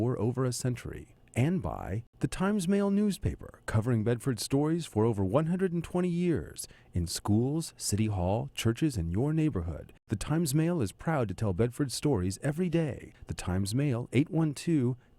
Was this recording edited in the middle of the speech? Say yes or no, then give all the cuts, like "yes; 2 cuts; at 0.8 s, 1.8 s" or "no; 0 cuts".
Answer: yes; 1 cut; at 2.0 s